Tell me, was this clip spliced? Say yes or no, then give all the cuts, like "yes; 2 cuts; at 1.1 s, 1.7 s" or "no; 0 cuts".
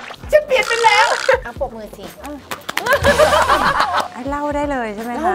yes; 2 cuts; at 1.5 s, 4.1 s